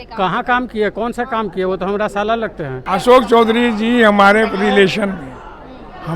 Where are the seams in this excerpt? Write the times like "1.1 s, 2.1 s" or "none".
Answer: 2.8 s